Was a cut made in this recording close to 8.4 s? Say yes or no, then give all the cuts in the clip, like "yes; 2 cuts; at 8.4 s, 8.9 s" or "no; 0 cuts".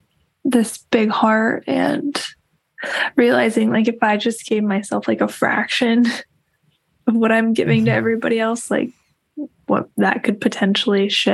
no; 1 cut; at 10.4 s